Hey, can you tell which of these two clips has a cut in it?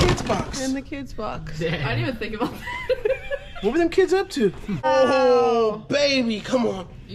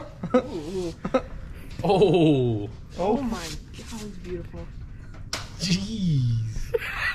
first; 1 cut; at 4.8 s

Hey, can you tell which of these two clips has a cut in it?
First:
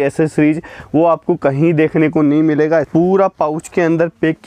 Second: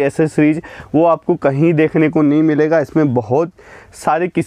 first; 1 cut; at 2.9 s

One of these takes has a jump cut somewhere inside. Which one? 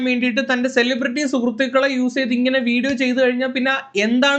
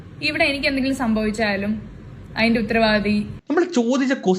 second; 1 cut; at 3.4 s

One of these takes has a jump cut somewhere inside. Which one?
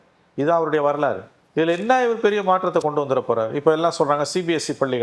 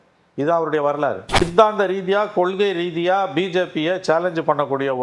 second; 1 cut; at 1.5 s

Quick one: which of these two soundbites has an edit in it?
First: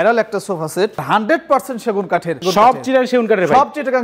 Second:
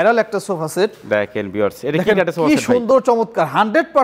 first; 2 cuts; at 1.0 s, 2.4 s

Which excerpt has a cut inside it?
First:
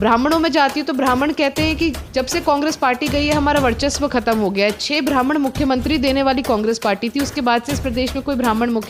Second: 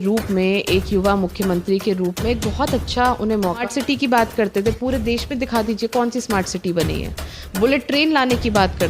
second; 1 cut; at 3.7 s

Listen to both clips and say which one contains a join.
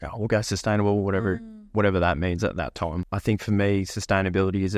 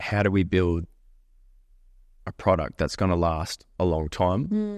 first; 1 cut; at 3.0 s

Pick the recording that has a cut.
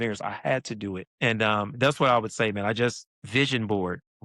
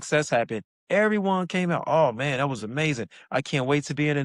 first; 2 cuts; at 1.1 s, 3.1 s

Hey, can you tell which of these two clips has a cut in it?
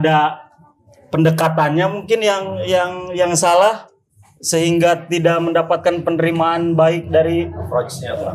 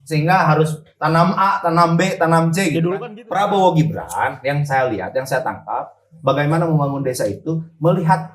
second; 1 cut; at 2.8 s

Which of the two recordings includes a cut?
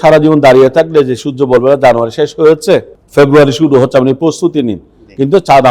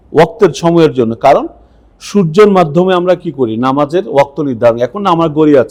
first; 1 cut; at 3.0 s

